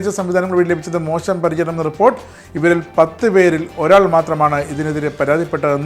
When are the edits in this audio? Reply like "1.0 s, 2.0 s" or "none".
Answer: none